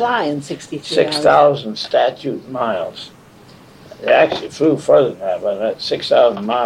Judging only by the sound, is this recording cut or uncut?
uncut